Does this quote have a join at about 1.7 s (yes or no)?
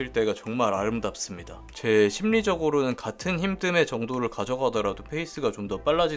yes